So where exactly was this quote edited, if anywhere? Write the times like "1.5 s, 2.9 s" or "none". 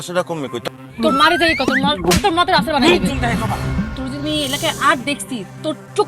0.9 s